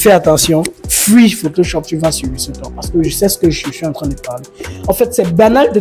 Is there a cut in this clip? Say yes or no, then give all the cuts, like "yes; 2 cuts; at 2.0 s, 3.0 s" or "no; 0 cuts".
no; 0 cuts